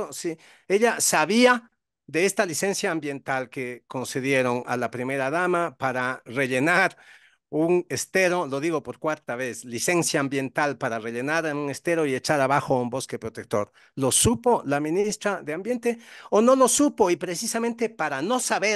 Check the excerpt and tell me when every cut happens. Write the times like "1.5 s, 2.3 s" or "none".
none